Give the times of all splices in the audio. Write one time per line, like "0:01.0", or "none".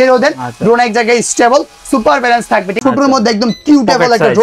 0:02.7